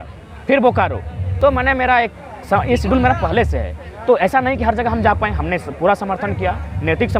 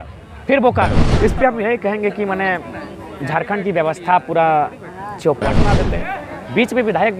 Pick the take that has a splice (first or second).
second